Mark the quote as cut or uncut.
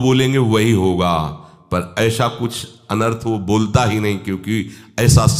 uncut